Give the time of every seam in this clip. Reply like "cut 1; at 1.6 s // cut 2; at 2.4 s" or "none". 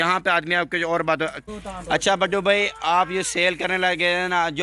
cut 1; at 1.4 s